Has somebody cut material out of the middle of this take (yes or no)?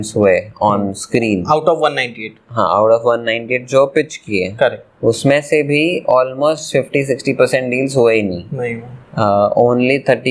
no